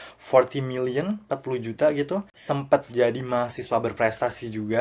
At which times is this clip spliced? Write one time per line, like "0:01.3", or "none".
0:02.3